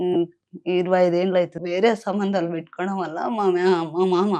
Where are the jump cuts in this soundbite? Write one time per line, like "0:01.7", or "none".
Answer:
0:01.6